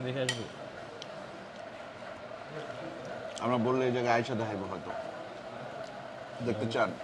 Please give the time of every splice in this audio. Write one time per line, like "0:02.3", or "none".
none